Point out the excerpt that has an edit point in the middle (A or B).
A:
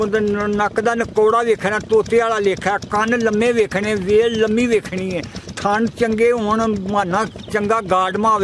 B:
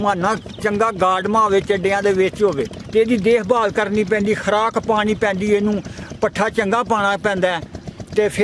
B